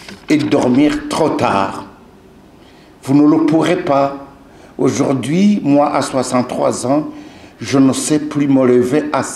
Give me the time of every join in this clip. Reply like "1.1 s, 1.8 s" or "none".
none